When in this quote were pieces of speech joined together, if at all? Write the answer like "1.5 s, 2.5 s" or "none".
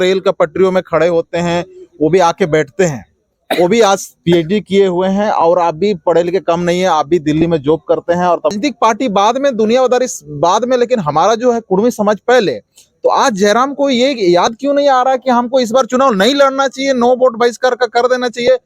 8.5 s